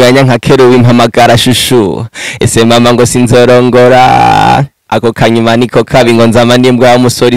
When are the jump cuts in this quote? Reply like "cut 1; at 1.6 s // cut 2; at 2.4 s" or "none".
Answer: none